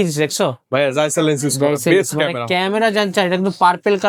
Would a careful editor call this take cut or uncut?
uncut